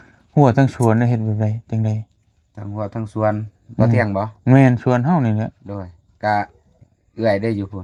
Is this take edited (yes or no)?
no